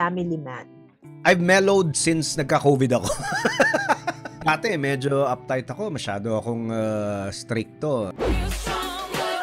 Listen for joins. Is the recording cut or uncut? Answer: cut